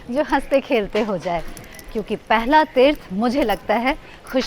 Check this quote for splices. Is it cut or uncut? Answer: uncut